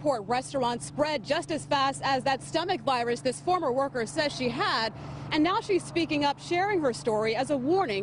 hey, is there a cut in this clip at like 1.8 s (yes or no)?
yes